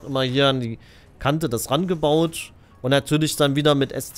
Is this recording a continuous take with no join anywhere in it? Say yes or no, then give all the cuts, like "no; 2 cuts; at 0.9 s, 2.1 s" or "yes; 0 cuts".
yes; 0 cuts